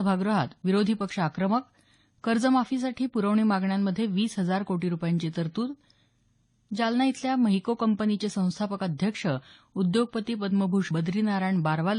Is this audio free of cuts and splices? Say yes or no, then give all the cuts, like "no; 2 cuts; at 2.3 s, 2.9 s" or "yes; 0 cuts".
no; 1 cut; at 10.9 s